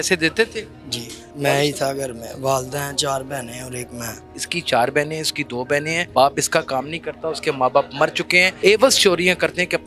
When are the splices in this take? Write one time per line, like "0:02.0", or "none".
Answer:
0:01.2
0:04.4
0:06.0
0:08.5